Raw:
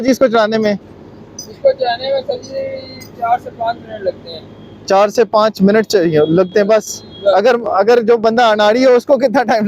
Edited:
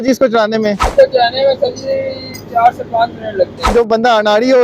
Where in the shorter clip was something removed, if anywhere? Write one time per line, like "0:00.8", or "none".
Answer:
0:00.8
0:03.7